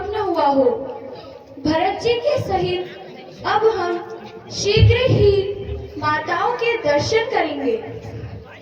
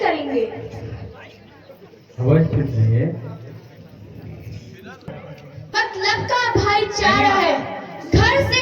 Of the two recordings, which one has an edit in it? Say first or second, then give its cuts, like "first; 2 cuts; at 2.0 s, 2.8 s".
second; 1 cut; at 5.1 s